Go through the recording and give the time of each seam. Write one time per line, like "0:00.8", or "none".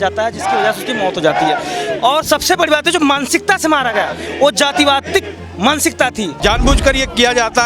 0:06.4